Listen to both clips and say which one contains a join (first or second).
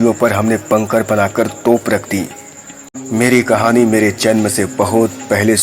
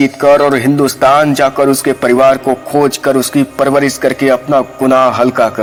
first